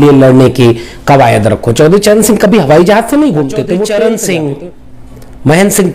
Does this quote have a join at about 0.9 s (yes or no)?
no